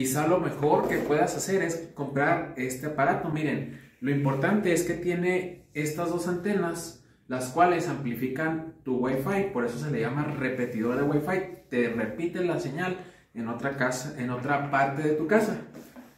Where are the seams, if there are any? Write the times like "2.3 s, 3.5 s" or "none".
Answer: none